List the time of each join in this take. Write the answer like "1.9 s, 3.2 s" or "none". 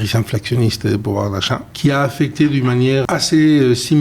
1.7 s, 3.0 s

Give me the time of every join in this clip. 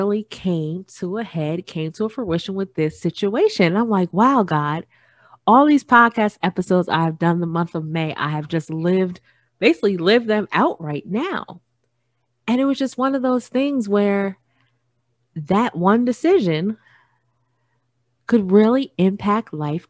none

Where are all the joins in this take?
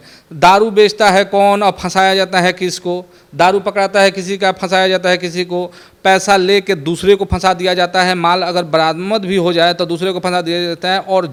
none

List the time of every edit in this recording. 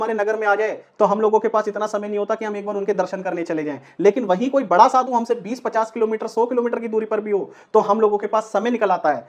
none

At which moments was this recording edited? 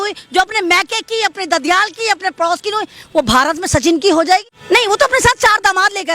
4.5 s

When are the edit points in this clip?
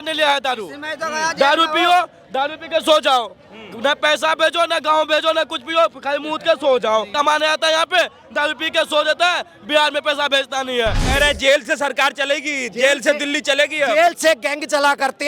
7.1 s, 11.0 s

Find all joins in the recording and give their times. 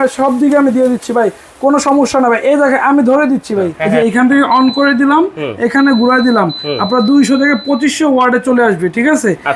3.8 s

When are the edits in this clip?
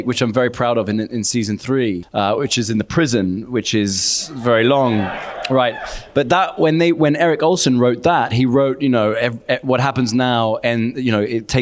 2.0 s

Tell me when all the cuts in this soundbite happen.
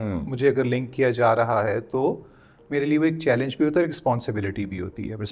none

